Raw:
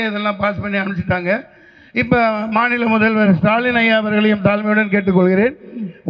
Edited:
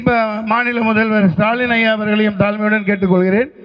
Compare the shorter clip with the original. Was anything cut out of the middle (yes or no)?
no